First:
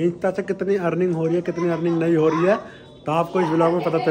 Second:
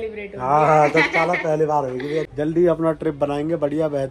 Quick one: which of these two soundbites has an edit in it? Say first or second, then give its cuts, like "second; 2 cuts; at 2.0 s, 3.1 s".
second; 1 cut; at 2.3 s